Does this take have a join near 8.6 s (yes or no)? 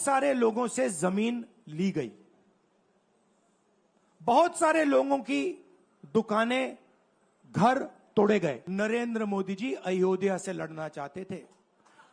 yes